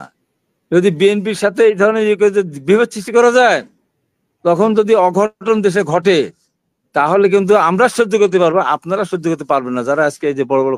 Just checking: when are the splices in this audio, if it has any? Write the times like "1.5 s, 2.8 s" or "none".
none